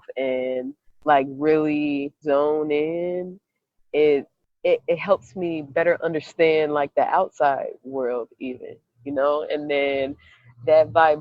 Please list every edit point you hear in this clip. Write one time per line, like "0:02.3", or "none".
0:02.2
0:04.4